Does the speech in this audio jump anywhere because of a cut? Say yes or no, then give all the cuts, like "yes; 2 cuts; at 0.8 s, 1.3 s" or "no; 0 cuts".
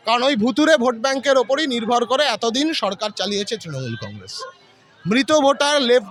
no; 0 cuts